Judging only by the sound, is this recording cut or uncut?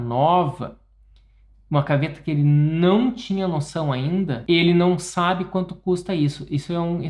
cut